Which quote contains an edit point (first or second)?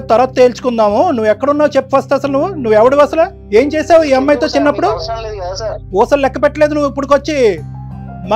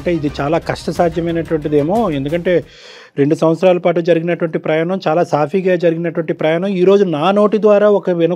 first